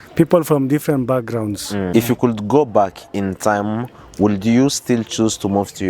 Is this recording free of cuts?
no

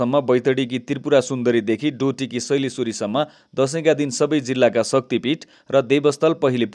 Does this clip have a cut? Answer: no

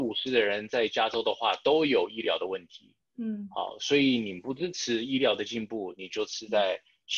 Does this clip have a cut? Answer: no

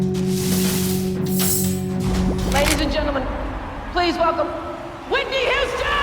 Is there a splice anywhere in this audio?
yes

